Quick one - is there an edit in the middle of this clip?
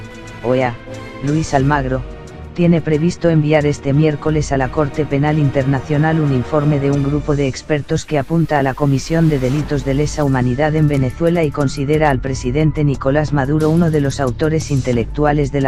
no; 0 cuts

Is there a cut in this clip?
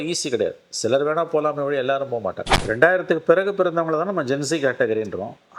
yes; 1 cut; at 2.5 s

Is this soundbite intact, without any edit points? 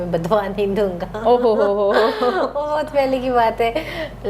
yes; 0 cuts

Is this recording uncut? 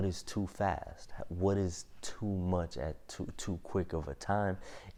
yes; 0 cuts

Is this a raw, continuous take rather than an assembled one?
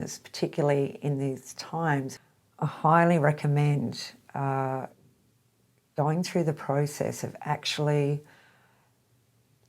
no; 1 cut; at 2.1 s

